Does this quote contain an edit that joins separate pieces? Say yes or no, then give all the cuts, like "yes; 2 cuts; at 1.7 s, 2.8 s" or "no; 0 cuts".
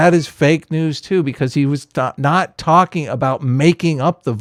no; 0 cuts